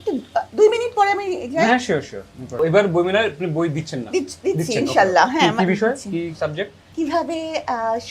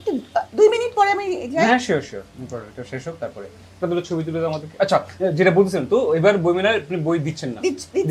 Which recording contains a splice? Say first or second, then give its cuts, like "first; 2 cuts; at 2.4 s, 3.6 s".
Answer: first; 2 cuts; at 2.6 s, 6.8 s